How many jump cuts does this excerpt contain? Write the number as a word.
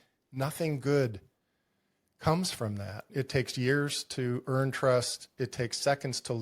one